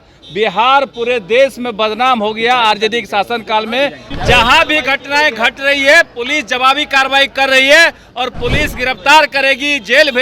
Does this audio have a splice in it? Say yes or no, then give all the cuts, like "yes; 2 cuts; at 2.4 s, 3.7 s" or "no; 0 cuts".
yes; 1 cut; at 4.1 s